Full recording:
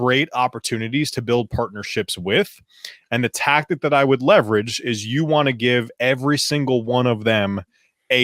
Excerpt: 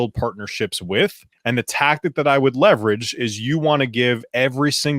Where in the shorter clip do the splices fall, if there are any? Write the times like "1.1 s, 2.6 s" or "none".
1.3 s